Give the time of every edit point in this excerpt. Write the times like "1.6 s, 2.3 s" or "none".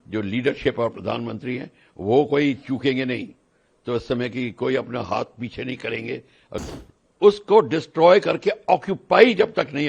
6.6 s